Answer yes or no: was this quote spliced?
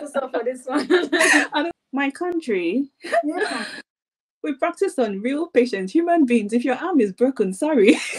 yes